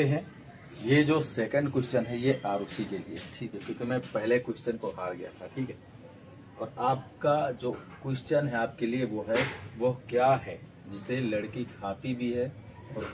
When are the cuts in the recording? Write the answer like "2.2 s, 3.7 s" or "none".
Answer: none